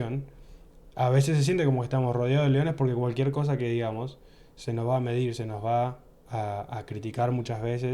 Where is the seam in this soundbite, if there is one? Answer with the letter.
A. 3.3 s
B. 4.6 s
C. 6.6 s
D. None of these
D